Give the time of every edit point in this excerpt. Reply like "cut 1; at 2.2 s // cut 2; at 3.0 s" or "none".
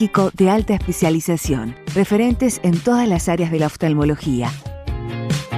cut 1; at 4.5 s